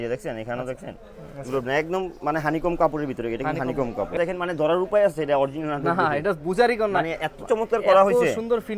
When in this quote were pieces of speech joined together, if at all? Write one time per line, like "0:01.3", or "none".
0:04.2